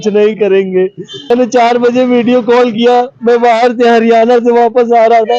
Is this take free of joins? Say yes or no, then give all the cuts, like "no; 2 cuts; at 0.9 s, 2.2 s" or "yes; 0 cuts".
no; 1 cut; at 1.3 s